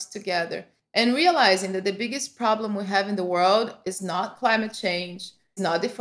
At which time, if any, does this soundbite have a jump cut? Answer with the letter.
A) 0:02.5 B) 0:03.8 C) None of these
C